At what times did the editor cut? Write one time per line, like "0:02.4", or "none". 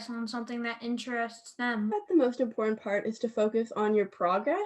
0:01.9

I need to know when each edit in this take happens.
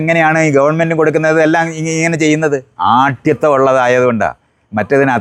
none

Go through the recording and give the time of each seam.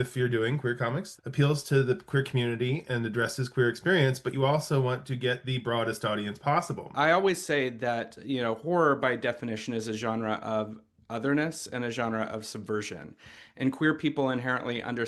0:01.1
0:06.9

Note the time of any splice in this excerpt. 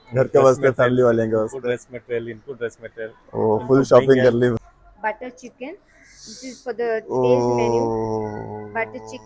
0:04.5

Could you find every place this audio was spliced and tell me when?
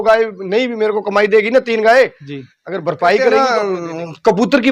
0:03.4

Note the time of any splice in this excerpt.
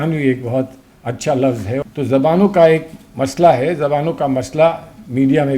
0:01.8

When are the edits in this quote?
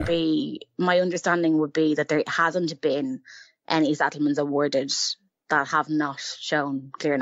none

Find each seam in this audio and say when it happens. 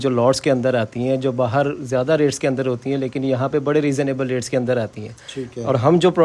none

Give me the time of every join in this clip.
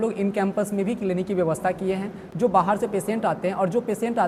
none

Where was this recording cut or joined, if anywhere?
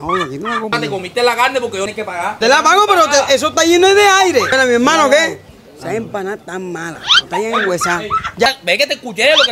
0:00.7
0:01.9
0:04.5
0:05.4
0:08.5

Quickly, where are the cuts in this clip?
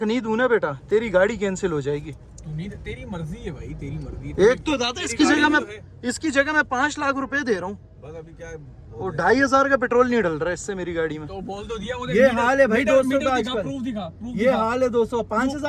none

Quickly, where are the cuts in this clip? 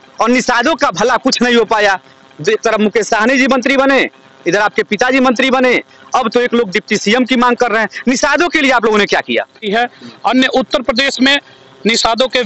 0:09.7

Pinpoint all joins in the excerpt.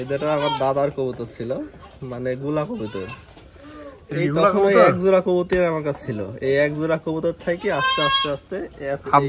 none

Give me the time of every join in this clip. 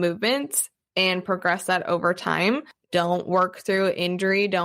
0:02.7

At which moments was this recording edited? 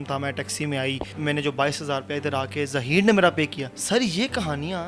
0:01.1
0:03.7

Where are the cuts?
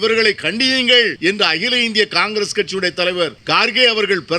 0:01.1
0:03.4

